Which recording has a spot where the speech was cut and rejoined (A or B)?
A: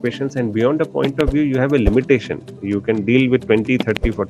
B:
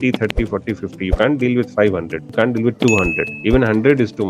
B